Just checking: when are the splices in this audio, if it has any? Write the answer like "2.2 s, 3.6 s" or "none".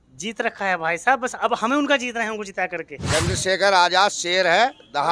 2.9 s